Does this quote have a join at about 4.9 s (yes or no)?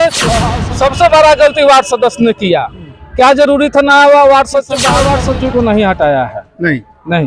yes